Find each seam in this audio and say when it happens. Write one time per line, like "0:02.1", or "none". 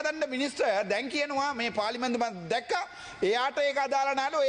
none